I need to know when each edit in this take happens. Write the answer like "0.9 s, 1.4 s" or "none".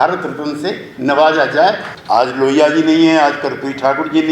1.9 s

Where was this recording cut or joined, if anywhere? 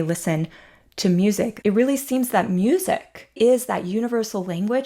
1.5 s, 3.4 s

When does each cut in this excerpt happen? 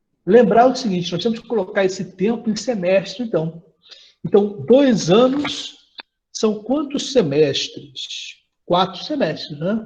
none

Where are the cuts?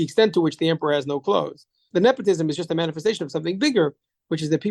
1.9 s

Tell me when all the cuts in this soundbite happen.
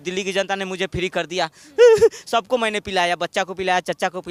none

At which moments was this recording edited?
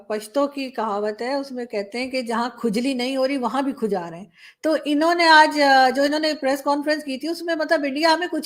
none

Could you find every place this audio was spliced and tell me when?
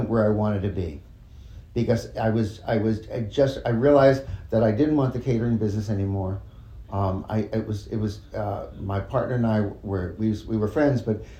none

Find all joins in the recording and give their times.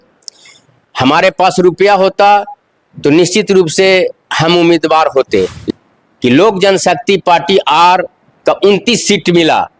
5.6 s

